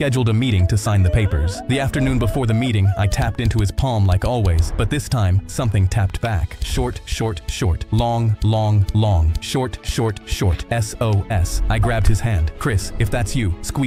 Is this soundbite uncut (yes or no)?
yes